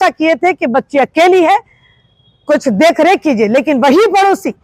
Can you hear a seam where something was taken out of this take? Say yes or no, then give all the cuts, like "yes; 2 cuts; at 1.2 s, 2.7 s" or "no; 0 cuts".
no; 0 cuts